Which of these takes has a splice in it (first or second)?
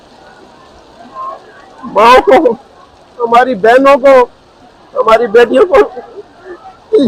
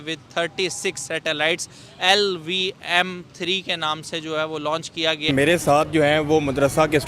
second